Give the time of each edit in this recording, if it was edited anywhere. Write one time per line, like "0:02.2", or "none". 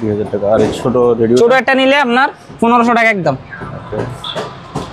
none